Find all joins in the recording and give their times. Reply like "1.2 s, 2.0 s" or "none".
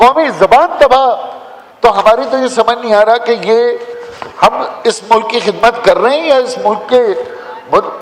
none